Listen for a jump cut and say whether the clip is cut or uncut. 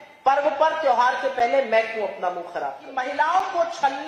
cut